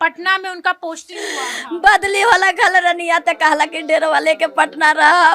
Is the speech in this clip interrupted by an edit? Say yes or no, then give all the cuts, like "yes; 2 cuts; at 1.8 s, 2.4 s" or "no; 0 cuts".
no; 0 cuts